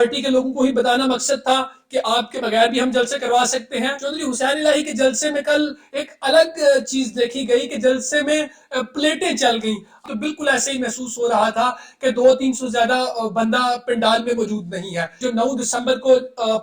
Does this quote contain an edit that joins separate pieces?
yes; 3 cuts; at 4.0 s, 10.1 s, 15.2 s

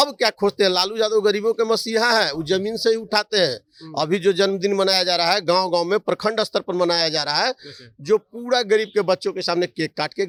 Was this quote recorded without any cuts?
yes; 0 cuts

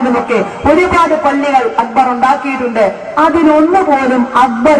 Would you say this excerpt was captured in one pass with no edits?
yes; 0 cuts

